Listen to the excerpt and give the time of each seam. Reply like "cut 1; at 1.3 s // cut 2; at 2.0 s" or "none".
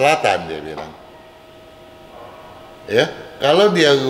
none